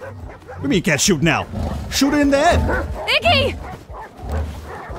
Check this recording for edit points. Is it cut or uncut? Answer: uncut